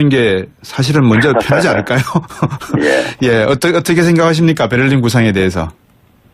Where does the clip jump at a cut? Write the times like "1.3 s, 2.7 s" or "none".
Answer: 2.2 s